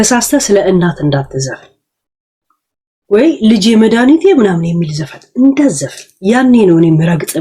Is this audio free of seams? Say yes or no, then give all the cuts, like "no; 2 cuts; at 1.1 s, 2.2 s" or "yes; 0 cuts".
yes; 0 cuts